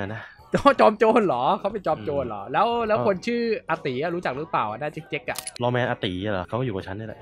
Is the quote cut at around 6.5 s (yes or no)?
yes